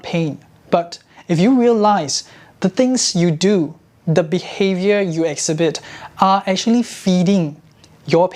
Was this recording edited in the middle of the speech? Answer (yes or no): no